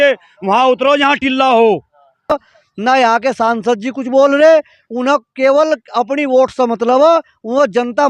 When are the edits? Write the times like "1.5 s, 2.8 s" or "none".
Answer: 2.3 s